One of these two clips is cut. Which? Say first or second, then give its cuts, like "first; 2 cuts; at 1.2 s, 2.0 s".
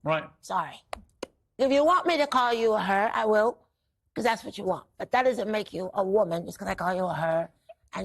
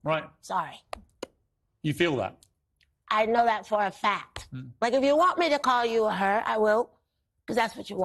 first; 1 cut; at 1.6 s